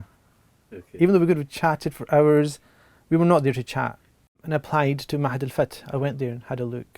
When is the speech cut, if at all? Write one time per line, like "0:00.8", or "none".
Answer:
0:04.4

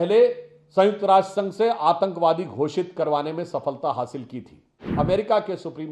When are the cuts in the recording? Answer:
0:04.8

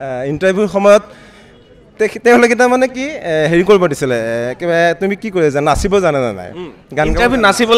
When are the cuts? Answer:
none

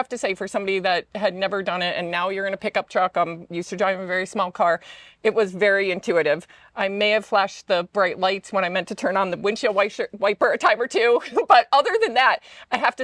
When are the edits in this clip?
none

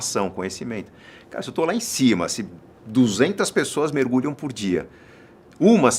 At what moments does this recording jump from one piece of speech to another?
none

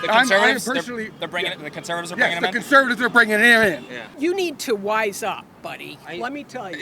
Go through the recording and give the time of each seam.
0:04.1

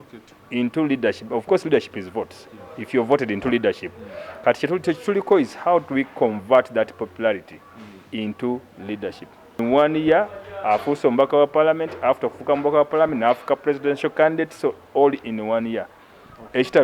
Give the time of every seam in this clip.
0:09.6

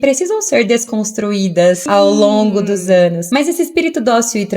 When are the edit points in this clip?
0:01.8
0:03.2

